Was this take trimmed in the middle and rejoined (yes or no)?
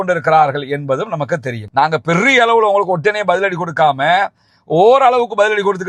yes